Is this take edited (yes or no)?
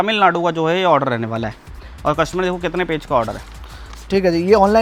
no